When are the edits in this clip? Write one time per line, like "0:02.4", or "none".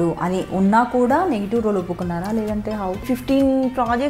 0:03.0